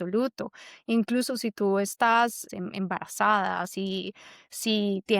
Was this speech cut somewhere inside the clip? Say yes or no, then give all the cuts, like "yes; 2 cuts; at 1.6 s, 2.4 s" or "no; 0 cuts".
yes; 1 cut; at 2.5 s